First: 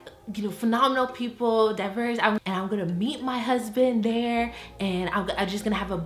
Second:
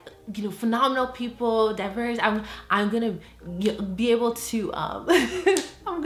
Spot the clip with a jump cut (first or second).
first